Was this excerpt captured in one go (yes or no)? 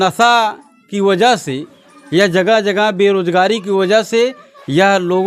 yes